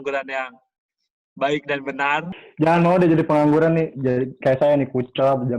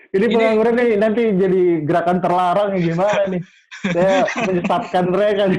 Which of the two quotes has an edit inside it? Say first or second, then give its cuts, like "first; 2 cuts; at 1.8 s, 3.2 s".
first; 1 cut; at 2.4 s